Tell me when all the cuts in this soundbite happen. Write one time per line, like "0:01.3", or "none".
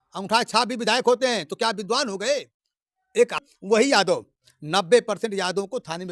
0:03.4